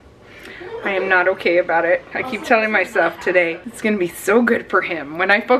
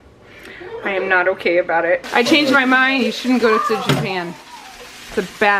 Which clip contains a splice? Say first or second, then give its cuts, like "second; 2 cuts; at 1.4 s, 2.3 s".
second; 1 cut; at 2.1 s